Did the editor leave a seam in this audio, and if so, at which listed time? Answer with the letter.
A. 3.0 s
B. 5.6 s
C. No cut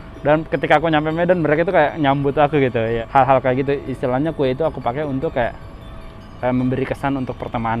A